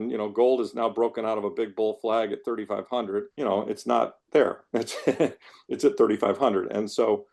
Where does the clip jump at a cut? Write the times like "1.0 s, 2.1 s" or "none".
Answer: 3.3 s